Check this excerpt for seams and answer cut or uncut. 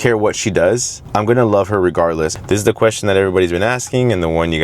cut